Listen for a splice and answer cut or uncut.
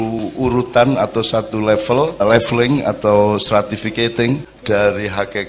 cut